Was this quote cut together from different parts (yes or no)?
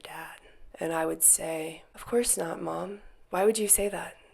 yes